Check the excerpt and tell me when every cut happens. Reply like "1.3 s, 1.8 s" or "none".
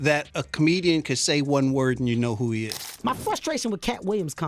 2.9 s

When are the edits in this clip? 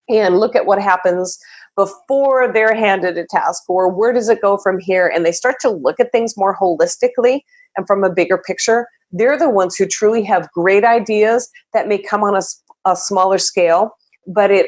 none

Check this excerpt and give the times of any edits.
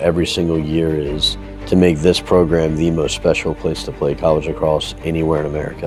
none

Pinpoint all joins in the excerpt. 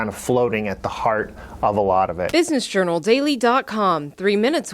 2.3 s

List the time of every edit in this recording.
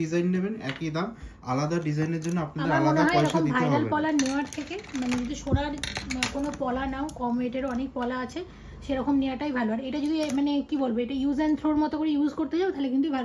none

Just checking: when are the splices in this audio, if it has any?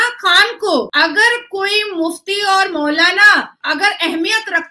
0.9 s

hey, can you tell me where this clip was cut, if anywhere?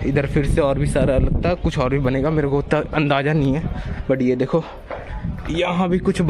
none

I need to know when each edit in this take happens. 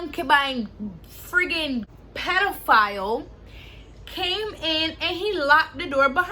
2.0 s

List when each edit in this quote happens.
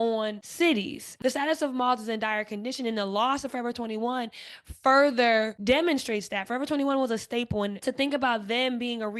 1.0 s, 7.8 s

